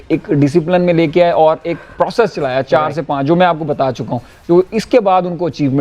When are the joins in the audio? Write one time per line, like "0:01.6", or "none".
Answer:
none